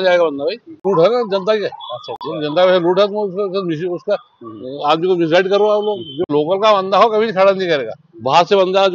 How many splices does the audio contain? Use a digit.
2